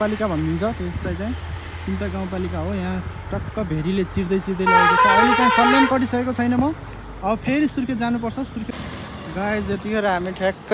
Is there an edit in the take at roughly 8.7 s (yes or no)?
yes